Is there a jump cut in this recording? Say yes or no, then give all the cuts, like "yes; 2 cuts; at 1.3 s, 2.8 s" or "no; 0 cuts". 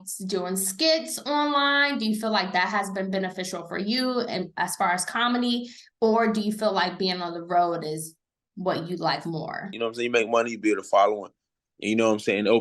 yes; 1 cut; at 9.7 s